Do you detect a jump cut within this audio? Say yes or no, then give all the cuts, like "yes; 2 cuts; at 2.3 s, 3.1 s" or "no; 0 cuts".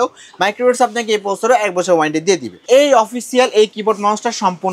yes; 1 cut; at 2.5 s